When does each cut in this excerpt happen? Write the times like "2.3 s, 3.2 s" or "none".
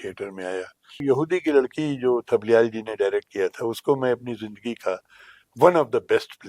1.0 s

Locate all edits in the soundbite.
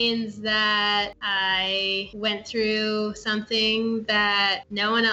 none

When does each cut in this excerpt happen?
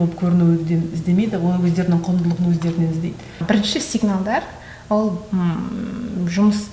3.4 s

